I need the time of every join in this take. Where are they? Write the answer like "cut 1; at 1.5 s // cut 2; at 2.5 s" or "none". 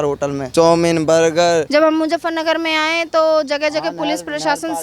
cut 1; at 1.7 s